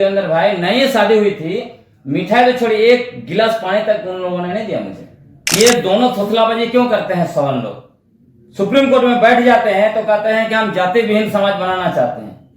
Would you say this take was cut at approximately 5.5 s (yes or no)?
yes